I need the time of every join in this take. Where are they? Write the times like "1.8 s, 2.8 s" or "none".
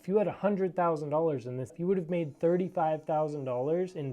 1.7 s